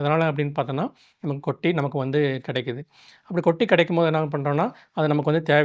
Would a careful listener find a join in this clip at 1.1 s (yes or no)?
yes